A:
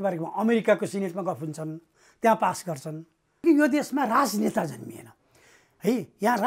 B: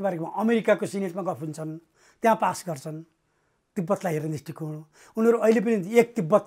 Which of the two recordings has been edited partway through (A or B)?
A